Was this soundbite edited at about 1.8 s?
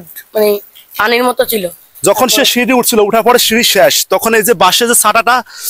yes; 1 cut; at 1.8 s

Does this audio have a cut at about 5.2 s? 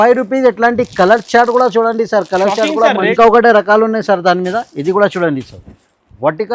no; 1 cut; at 2.7 s

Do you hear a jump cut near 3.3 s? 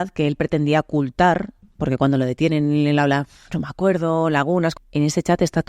no; 1 cut; at 4.8 s

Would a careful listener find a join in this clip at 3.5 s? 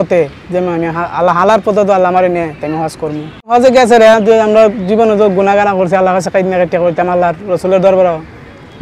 yes; 1 cut; at 3.5 s

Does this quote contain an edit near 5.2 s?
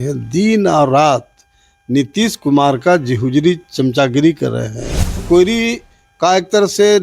yes; 1 cut; at 5.2 s

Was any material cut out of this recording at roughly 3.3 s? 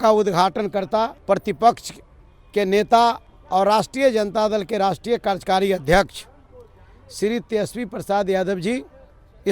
yes; 2 cuts; at 1.2 s, 3.3 s

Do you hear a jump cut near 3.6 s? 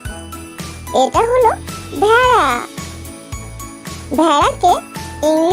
no; 1 cut; at 0.9 s

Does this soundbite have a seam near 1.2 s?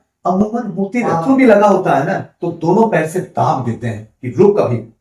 yes; 1 cut; at 1.2 s

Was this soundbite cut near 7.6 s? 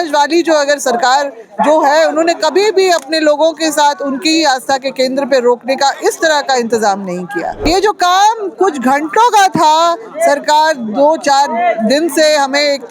yes; 1 cut; at 7.6 s

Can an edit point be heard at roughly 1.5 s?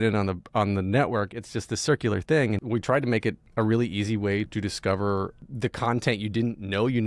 no; 3 cuts; at 3.0 s, 4.5 s, 5.4 s

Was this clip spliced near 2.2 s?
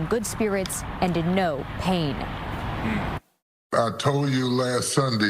yes; 1 cut; at 2.2 s

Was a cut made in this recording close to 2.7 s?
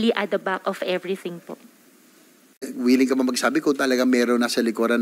yes; 1 cut; at 2.7 s

